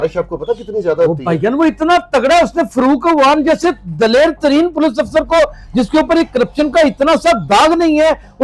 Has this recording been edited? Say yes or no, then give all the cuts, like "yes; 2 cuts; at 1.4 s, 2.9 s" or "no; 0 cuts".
no; 0 cuts